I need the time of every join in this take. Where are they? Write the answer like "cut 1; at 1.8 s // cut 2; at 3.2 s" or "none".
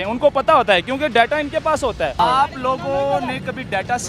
cut 1; at 2.2 s